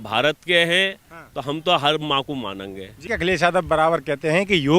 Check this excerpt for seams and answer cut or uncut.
cut